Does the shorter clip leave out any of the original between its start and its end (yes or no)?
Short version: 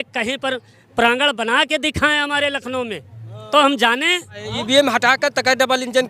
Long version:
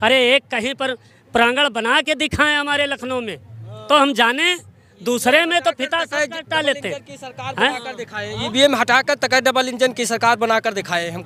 yes